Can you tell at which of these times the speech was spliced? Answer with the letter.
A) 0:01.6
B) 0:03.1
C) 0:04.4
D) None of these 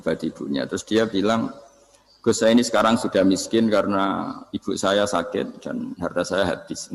D